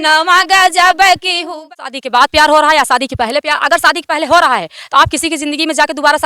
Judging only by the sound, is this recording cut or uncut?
cut